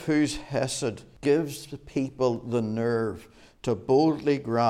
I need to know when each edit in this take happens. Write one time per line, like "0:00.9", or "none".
0:01.1